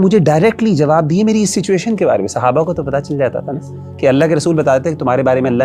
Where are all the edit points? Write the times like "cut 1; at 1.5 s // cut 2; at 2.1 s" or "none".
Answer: none